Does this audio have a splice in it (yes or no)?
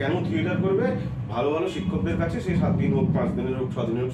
no